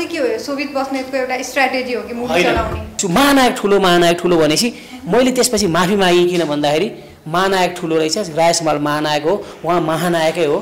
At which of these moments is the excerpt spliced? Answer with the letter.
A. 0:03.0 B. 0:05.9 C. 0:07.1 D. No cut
A